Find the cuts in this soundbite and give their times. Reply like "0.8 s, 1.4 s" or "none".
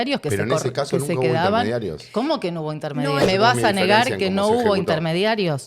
3.2 s